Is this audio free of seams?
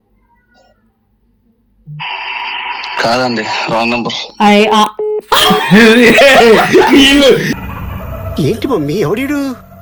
yes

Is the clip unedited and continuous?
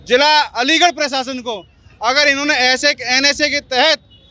yes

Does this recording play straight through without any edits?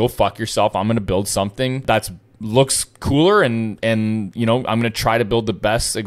no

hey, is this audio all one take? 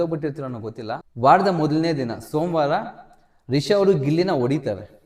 no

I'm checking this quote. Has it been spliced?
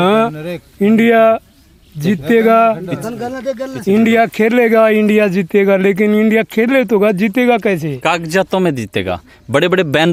no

